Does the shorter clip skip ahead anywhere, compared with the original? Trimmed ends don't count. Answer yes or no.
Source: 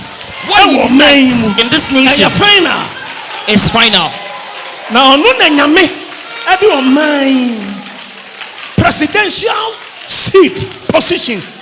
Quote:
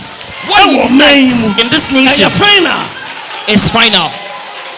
no